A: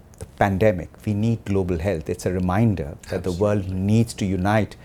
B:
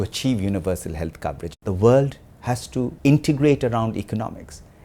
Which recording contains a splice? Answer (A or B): B